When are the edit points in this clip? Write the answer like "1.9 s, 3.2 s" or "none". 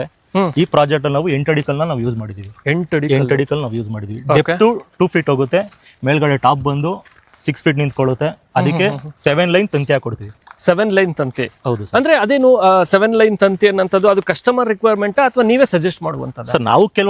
none